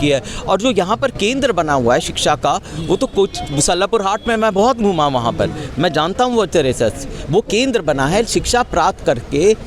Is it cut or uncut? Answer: uncut